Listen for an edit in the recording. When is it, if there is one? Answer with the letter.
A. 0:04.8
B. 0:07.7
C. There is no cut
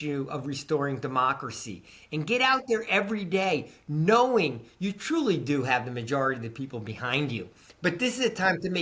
C